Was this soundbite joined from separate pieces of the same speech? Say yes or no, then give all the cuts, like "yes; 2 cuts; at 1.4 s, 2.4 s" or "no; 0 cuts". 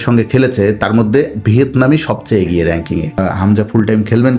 yes; 1 cut; at 3.2 s